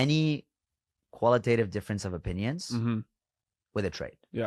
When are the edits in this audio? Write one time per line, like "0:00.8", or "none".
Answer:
none